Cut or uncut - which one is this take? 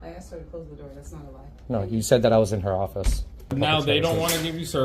cut